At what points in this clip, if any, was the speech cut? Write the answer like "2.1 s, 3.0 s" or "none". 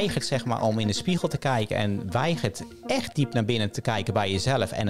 none